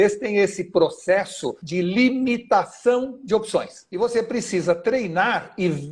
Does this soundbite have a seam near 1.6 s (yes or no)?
yes